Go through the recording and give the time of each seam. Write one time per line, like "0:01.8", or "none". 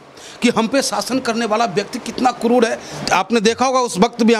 0:02.9